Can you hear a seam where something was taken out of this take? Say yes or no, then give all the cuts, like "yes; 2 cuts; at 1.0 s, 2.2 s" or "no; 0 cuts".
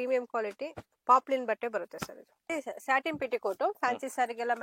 yes; 1 cut; at 2.5 s